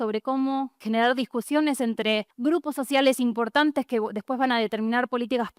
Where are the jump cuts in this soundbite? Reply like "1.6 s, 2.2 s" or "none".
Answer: 0.8 s, 2.3 s